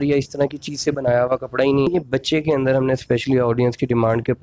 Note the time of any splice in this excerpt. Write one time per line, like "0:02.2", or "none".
0:01.9